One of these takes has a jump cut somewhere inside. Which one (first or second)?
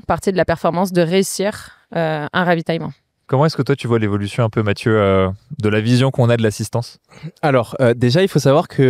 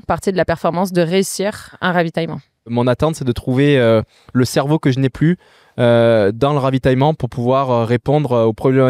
second